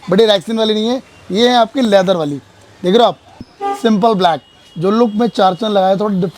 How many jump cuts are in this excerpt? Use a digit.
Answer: 1